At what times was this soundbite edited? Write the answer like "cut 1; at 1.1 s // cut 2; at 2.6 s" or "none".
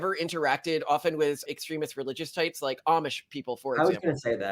cut 1; at 1.4 s